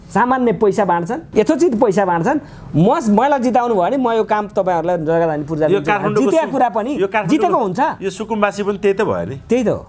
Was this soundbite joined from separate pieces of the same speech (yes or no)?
yes